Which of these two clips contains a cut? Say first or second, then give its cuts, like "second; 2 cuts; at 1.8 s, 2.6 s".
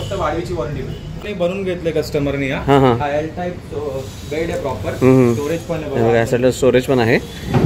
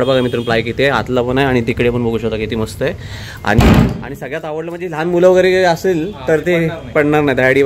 first; 1 cut; at 1.2 s